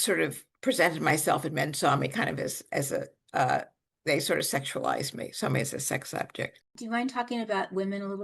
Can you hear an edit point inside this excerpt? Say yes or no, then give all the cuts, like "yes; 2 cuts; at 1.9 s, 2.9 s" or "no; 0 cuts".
yes; 1 cut; at 6.7 s